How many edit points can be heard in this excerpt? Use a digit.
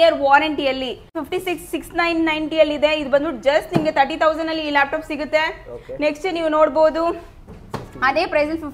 1